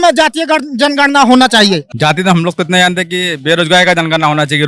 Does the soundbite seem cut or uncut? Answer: cut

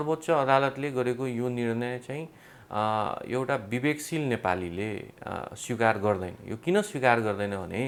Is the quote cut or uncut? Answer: uncut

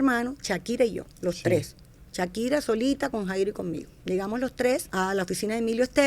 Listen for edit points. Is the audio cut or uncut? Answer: cut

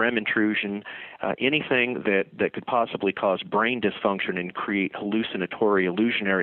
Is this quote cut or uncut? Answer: uncut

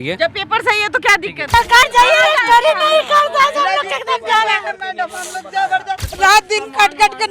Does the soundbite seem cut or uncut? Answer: cut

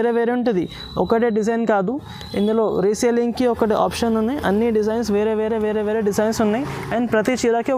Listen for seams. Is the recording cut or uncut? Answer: uncut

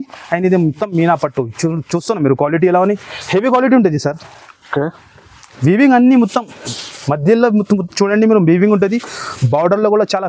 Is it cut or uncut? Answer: uncut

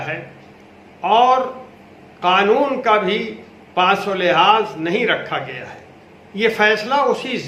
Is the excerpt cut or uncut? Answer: uncut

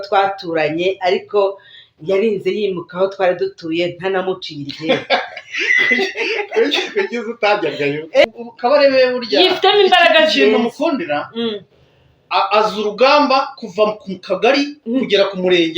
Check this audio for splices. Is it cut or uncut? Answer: cut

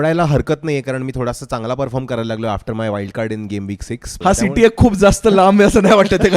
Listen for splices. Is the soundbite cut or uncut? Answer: cut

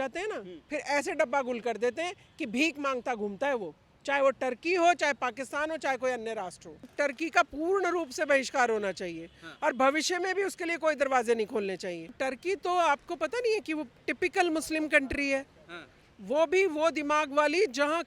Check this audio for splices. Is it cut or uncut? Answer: cut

